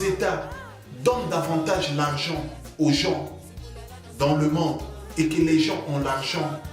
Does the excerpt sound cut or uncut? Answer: uncut